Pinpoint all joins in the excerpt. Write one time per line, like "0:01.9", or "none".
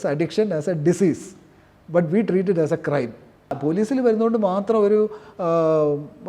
0:03.6